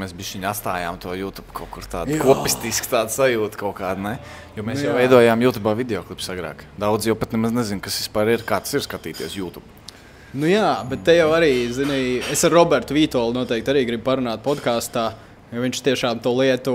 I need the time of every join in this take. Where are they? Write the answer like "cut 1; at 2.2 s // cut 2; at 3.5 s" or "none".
none